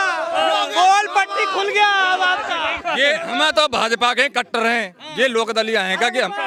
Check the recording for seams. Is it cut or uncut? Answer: uncut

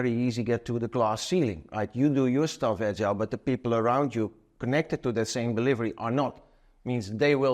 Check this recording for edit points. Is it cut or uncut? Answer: uncut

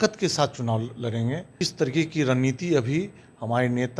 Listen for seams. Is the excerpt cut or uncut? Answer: cut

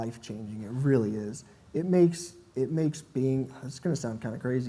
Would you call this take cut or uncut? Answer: uncut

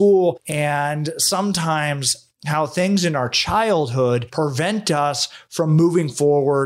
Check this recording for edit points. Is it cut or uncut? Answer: uncut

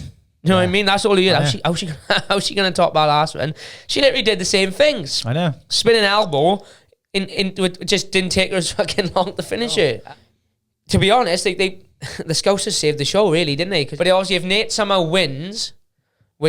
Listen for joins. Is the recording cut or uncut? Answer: cut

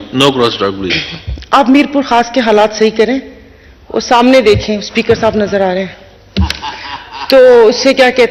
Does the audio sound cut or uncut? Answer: uncut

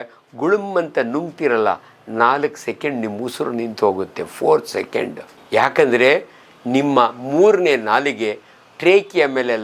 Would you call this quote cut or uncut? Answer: uncut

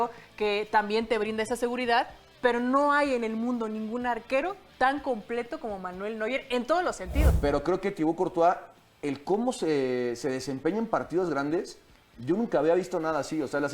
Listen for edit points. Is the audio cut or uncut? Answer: cut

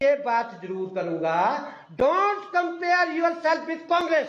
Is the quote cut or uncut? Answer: uncut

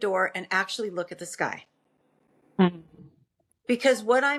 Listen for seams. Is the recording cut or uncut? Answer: uncut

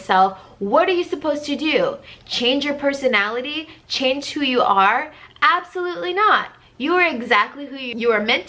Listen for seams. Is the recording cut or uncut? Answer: uncut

